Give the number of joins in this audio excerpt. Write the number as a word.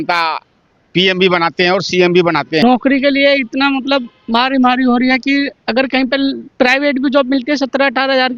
one